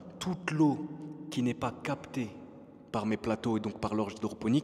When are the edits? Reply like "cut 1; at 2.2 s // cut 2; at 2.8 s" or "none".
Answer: none